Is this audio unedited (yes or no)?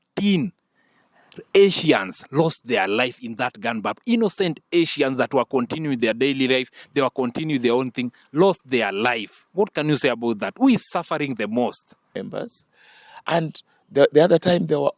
no